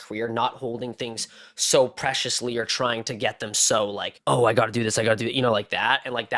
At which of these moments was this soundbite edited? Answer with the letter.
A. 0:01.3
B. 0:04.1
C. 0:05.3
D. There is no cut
B